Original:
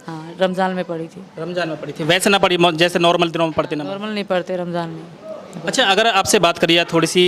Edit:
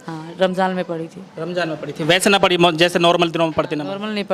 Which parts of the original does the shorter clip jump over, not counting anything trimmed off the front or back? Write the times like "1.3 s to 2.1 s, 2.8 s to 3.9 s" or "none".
none